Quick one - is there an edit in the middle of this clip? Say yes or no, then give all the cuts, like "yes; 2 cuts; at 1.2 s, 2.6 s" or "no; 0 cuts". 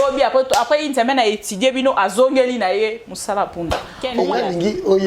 yes; 1 cut; at 4.0 s